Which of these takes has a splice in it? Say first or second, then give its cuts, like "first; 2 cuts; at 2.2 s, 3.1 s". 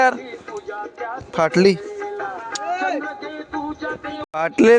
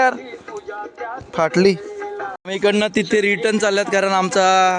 second; 1 cut; at 2.4 s